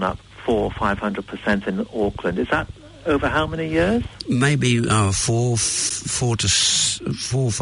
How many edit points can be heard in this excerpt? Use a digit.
0